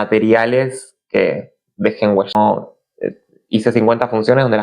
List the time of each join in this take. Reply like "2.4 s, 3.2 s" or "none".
2.3 s